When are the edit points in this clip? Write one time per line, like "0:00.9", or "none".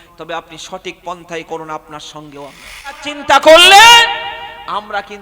0:03.1